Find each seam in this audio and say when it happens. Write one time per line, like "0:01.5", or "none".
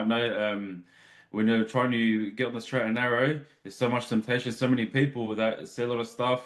none